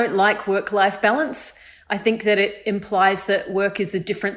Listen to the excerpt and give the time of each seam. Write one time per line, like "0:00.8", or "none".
none